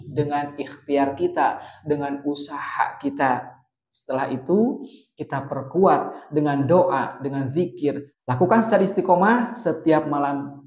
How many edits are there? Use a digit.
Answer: 1